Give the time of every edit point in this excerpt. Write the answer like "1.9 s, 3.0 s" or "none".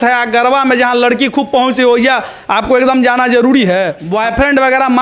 4.0 s

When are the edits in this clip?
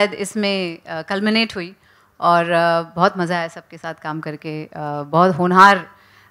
none

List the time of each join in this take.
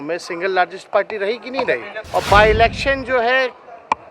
1.9 s

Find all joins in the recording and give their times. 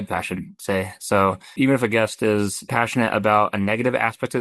1.5 s, 2.7 s

